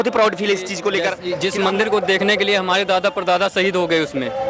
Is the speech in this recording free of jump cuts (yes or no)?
no